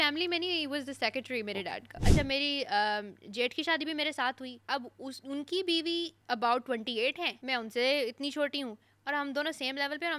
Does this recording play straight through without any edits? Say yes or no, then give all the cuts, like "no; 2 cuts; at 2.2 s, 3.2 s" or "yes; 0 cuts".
no; 4 cuts; at 2.0 s, 4.5 s, 6.2 s, 7.3 s